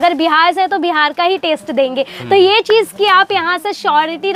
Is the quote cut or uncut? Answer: uncut